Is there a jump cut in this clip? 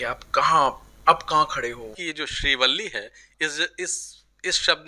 yes; 1 cut; at 2.0 s

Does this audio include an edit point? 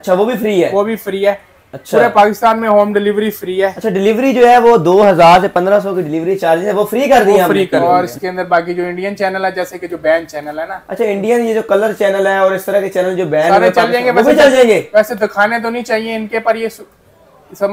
yes; 1 cut; at 7.8 s

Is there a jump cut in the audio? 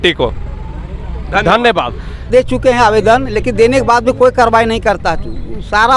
yes; 1 cut; at 2.3 s

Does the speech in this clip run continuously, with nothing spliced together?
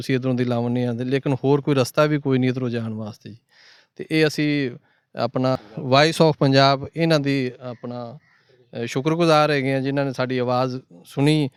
yes; 0 cuts

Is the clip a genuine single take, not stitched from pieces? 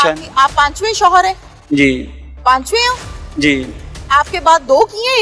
yes; 0 cuts

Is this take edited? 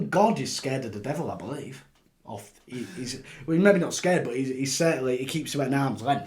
no; 0 cuts

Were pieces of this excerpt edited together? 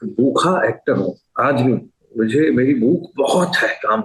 no; 0 cuts

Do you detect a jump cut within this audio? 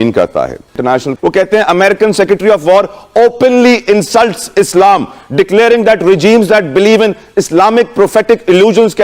yes; 1 cut; at 1.1 s

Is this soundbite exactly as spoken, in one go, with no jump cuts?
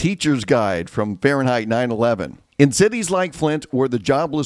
no; 1 cut; at 2.4 s

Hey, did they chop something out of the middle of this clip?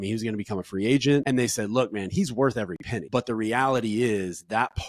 yes; 2 cuts; at 1.2 s, 2.9 s

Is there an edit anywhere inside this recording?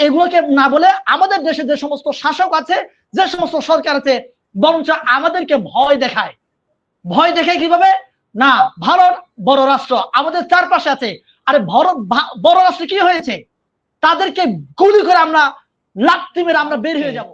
no; 0 cuts

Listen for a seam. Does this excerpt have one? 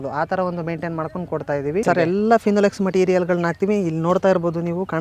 yes; 1 cut; at 1.8 s

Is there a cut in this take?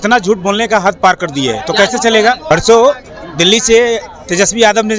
yes; 1 cut; at 2.4 s

